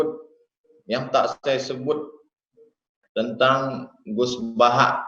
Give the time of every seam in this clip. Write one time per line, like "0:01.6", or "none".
none